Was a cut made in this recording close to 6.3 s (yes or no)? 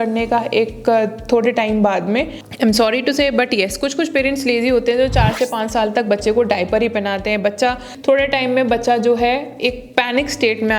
no